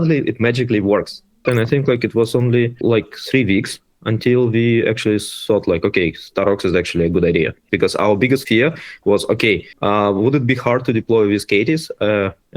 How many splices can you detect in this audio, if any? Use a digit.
5